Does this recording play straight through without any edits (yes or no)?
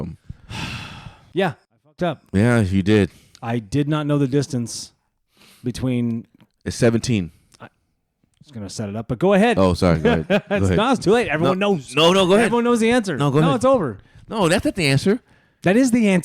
no